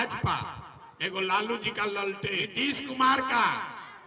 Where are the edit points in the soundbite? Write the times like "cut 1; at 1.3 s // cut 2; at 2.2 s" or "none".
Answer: cut 1; at 2.4 s